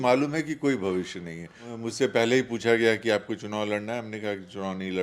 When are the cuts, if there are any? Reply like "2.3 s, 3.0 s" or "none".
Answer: 1.8 s